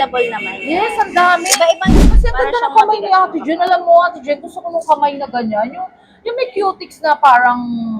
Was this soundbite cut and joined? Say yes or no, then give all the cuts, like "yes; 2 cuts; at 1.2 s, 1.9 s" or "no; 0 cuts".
yes; 1 cut; at 1.9 s